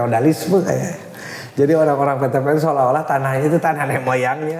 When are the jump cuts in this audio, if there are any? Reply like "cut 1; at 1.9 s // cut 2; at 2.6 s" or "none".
none